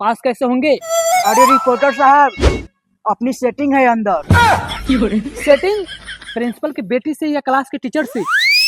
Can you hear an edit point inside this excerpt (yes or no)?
no